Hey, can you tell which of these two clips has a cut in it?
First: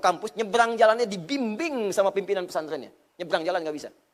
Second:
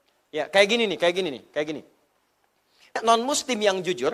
second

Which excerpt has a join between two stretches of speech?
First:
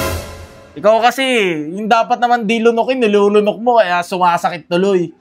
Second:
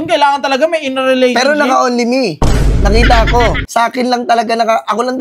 second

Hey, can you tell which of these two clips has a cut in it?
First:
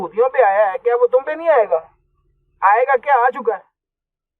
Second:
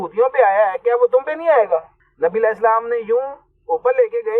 second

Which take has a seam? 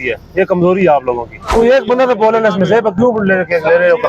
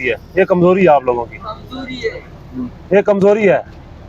first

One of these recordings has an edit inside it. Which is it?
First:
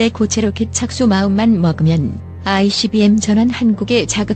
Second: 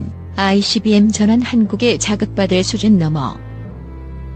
second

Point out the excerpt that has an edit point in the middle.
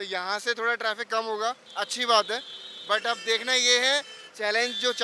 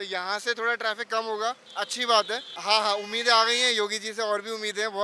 second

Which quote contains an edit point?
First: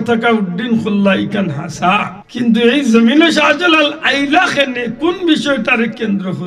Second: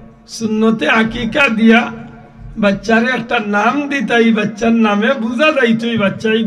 first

